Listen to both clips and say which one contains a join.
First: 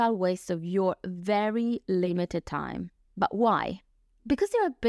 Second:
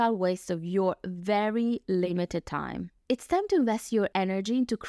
second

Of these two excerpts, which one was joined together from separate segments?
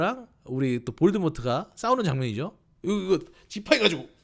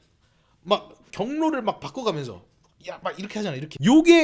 second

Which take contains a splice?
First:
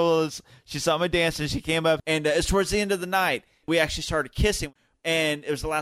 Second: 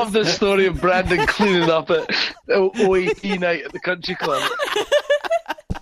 first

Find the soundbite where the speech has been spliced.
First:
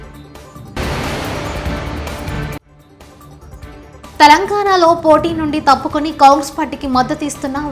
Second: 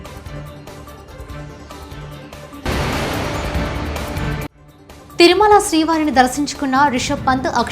second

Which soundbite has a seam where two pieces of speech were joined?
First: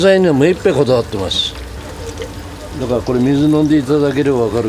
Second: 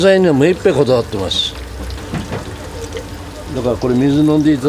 first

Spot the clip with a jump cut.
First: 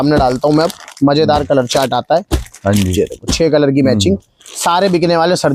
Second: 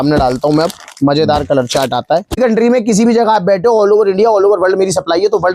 second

